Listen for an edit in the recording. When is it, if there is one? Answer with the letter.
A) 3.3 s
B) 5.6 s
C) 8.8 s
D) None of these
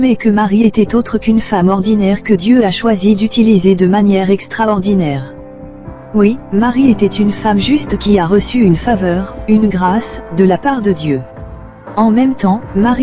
C